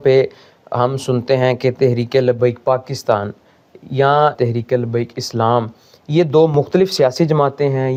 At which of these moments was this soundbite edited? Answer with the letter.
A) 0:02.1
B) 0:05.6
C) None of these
C